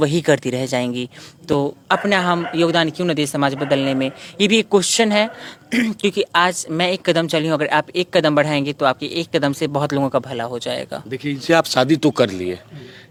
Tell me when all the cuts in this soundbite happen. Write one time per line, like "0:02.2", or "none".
none